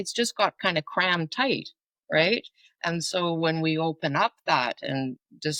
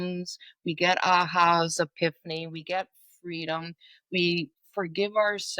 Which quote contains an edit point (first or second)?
second